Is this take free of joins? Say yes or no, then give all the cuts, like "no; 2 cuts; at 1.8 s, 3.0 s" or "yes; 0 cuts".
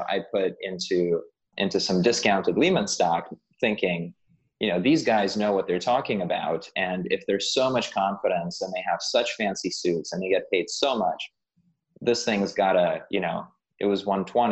yes; 0 cuts